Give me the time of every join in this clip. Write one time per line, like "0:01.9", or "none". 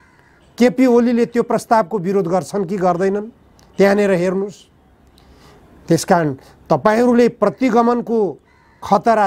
none